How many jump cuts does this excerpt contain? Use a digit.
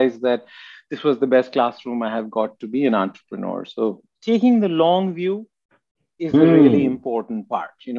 1